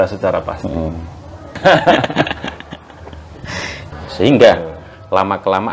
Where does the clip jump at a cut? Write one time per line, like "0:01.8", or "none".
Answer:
0:01.5
0:03.9